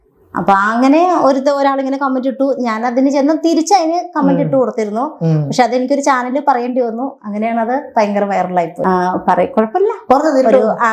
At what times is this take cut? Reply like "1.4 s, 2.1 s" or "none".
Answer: 8.8 s